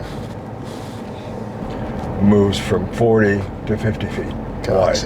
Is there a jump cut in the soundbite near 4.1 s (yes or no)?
no